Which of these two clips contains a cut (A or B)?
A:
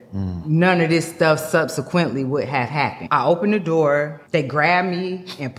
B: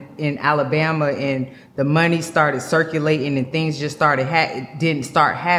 A